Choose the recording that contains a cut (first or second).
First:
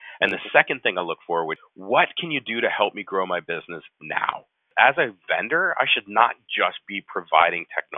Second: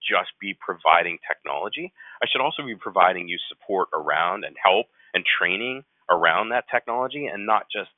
first